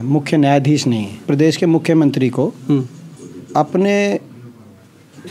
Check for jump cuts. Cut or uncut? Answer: cut